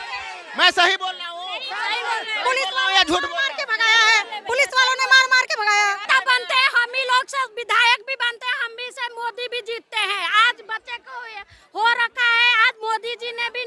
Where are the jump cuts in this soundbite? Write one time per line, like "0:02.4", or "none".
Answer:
0:06.0